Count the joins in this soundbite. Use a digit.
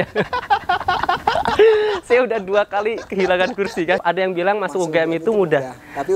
1